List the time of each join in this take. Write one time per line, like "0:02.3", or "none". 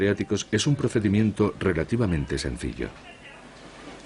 0:01.2